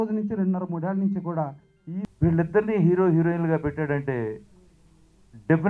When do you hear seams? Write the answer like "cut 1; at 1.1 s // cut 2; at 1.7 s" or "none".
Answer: cut 1; at 2.1 s